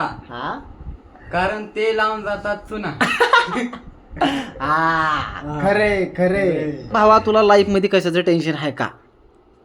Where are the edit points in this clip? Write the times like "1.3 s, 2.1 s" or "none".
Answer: 6.7 s